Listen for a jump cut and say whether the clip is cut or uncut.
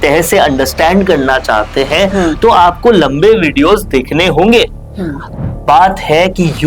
cut